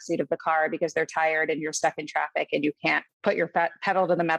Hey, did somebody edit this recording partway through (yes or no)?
no